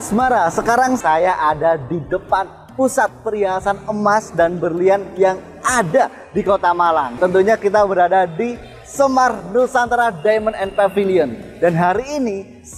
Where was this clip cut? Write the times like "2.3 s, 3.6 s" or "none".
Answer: 1.0 s, 7.2 s